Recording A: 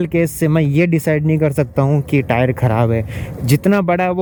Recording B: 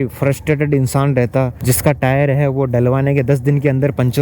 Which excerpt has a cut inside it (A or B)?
B